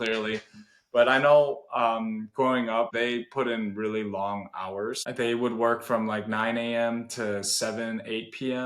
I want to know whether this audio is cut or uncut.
cut